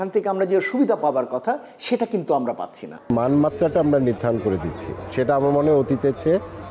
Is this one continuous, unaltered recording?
no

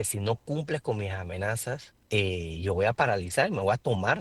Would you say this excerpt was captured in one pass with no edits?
no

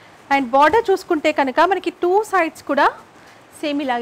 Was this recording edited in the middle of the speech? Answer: no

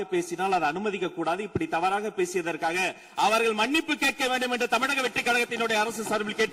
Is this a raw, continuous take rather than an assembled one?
yes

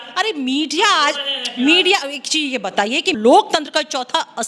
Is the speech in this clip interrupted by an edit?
yes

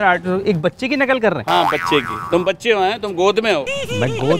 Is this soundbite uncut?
yes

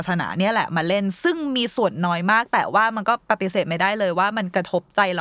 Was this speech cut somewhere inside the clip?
yes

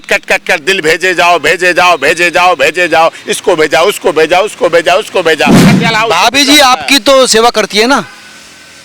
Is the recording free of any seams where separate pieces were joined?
no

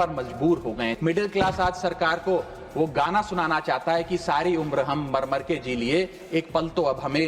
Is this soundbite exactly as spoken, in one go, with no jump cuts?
no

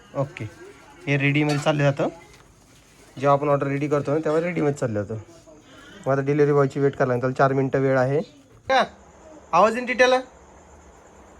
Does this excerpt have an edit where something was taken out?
yes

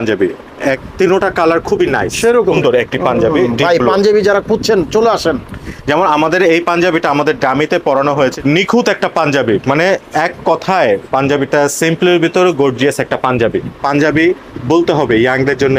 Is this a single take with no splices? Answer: no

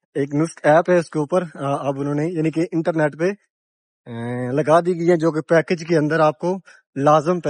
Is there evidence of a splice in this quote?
no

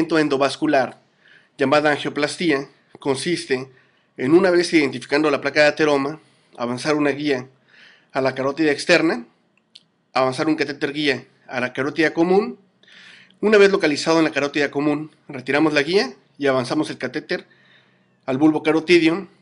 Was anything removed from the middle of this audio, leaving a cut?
no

